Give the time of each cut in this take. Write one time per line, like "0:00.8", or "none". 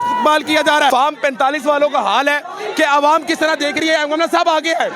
0:00.9